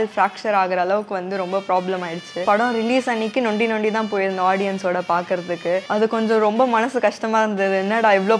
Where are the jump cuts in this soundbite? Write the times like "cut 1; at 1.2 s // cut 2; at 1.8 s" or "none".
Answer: cut 1; at 2.4 s // cut 2; at 5.9 s